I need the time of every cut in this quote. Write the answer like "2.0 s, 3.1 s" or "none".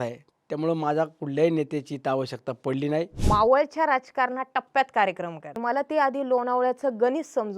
3.2 s, 5.6 s